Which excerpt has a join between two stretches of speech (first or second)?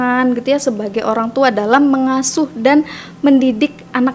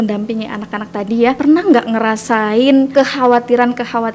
second